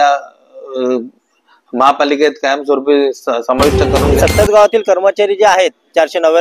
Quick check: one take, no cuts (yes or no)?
no